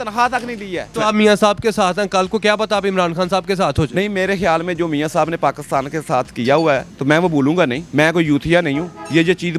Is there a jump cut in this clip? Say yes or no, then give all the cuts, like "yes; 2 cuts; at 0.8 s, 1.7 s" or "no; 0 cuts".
yes; 3 cuts; at 0.9 s, 6.9 s, 7.8 s